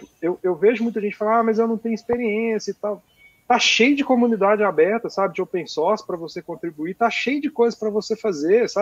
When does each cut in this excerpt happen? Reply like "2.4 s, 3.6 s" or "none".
none